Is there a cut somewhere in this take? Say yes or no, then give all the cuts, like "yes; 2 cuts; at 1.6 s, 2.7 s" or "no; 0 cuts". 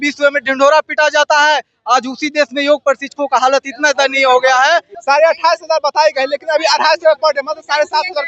yes; 1 cut; at 4.9 s